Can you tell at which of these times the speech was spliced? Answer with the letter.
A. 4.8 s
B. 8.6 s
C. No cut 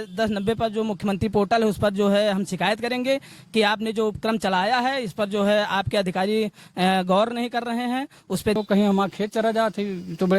B